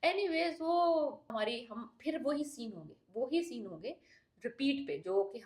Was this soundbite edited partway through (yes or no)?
yes